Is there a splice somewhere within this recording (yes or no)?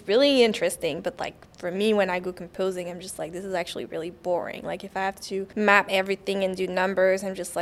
yes